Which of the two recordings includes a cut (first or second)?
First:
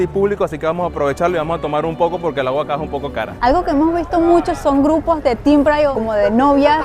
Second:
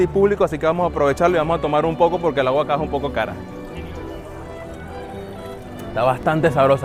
first